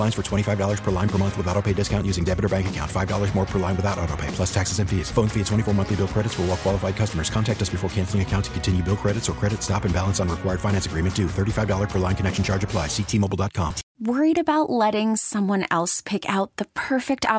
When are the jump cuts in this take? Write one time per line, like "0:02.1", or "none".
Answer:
0:13.8